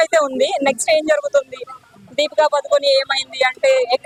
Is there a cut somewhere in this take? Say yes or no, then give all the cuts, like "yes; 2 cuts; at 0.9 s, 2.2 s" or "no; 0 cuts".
no; 0 cuts